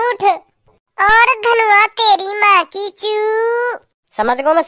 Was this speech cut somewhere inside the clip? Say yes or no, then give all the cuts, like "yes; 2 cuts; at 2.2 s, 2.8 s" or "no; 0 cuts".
no; 0 cuts